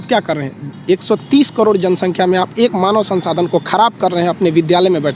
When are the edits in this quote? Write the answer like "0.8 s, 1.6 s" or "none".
none